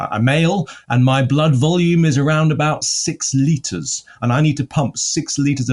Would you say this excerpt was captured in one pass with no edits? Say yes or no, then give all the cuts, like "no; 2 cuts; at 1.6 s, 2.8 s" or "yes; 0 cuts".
yes; 0 cuts